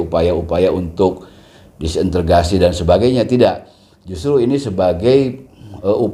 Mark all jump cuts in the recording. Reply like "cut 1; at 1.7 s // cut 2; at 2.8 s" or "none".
none